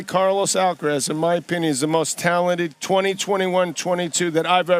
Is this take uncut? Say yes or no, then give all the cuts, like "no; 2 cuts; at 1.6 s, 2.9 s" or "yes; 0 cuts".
no; 1 cut; at 2.8 s